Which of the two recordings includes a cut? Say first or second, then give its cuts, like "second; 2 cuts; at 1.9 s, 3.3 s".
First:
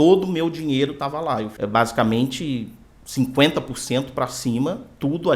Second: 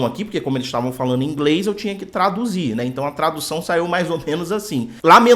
first; 1 cut; at 1.5 s